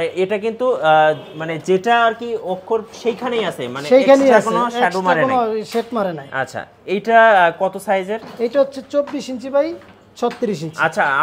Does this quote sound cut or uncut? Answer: uncut